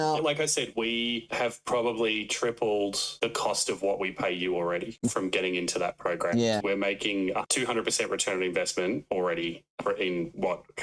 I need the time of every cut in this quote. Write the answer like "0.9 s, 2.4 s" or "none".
7.5 s, 9.8 s